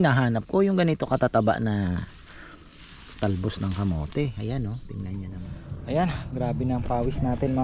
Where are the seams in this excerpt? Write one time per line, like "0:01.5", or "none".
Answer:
0:05.5